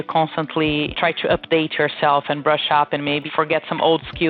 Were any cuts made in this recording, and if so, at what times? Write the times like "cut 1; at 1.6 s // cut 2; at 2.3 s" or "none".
cut 1; at 3.3 s